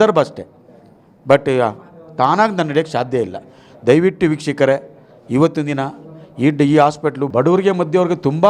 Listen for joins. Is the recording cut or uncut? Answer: cut